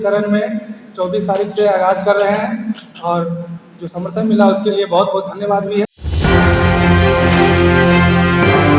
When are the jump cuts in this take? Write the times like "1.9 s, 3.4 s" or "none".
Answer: 6.0 s